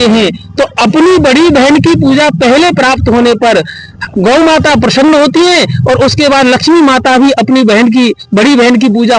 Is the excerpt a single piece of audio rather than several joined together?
yes; 0 cuts

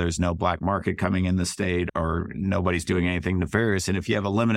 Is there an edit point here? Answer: no; 0 cuts

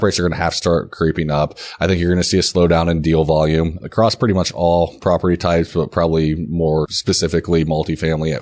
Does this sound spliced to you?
yes; 1 cut; at 6.9 s

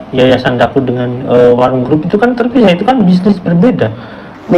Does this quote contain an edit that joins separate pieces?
no; 0 cuts

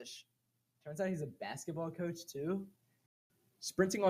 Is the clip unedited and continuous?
no; 1 cut; at 3.1 s

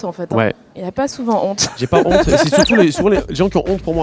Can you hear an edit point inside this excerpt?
no; 0 cuts

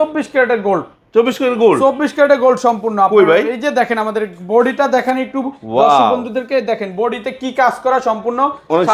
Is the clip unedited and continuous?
yes; 0 cuts

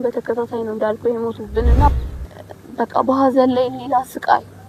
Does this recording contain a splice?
yes; 1 cut; at 1.9 s

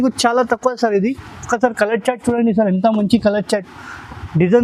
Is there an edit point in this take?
no; 0 cuts

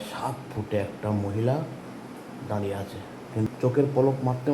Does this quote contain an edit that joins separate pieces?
yes; 1 cut; at 3.5 s

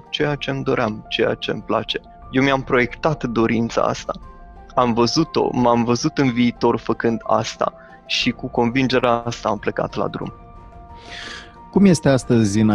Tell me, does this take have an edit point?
no; 0 cuts

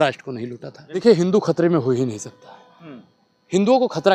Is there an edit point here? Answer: yes; 1 cut; at 1.0 s

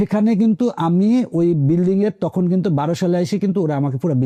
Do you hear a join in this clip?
no; 0 cuts

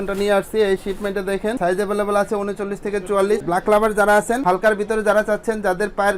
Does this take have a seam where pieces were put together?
yes; 2 cuts; at 1.6 s, 3.4 s

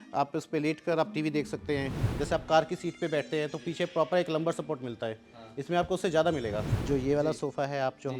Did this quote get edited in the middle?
yes; 2 cuts; at 2.0 s, 6.7 s

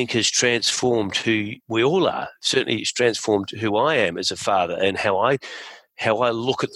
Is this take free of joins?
no; 1 cut; at 1.6 s

